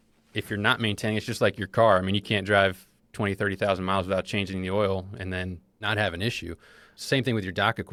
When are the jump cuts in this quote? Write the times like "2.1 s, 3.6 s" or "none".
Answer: none